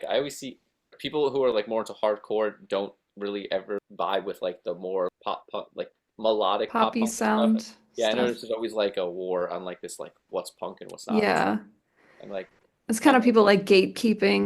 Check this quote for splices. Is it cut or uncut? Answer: cut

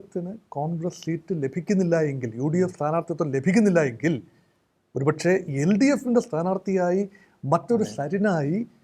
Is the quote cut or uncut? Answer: uncut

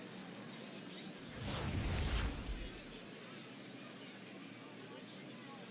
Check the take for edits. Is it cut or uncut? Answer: uncut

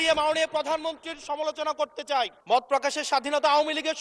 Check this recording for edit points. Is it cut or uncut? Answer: cut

